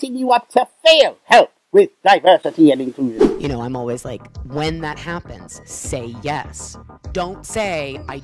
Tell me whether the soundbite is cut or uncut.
uncut